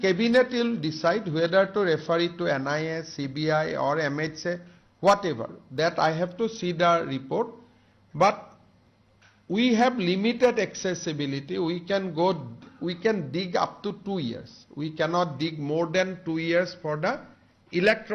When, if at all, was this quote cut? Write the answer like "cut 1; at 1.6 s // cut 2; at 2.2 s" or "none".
none